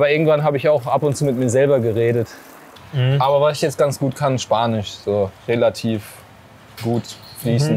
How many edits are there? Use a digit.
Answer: 1